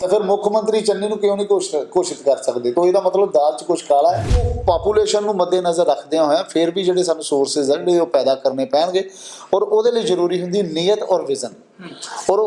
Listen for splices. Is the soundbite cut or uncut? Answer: cut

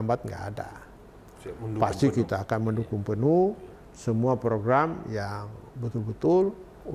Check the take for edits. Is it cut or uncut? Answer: uncut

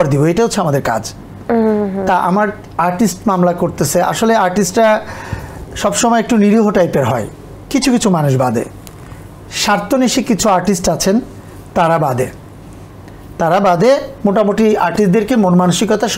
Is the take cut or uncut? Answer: uncut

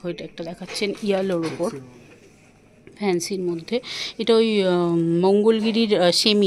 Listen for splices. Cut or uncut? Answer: uncut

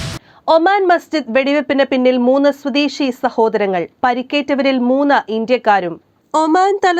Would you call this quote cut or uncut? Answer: uncut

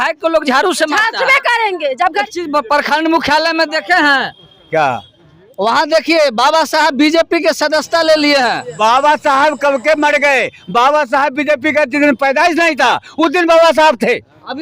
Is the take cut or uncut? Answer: cut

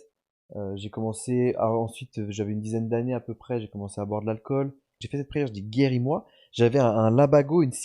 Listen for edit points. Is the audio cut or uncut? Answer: cut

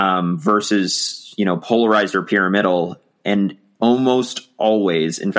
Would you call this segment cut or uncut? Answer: uncut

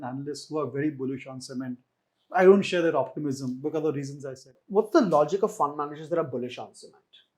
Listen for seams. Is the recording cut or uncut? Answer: cut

